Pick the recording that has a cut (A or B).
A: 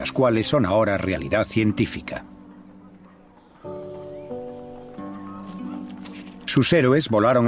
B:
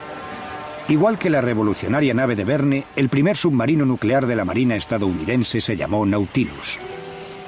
B